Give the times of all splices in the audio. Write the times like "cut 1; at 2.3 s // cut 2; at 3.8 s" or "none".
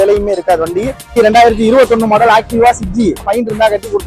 cut 1; at 1.1 s // cut 2; at 3.3 s